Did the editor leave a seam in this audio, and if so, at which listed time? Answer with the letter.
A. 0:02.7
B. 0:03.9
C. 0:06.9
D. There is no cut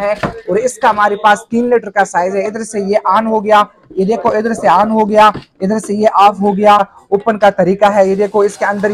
C